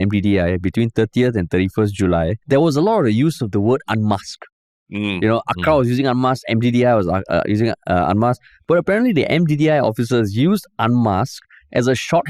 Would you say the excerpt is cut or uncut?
cut